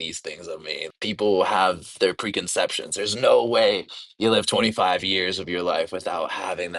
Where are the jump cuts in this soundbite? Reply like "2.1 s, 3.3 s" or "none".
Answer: 0.9 s